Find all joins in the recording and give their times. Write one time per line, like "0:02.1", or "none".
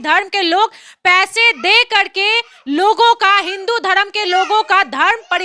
none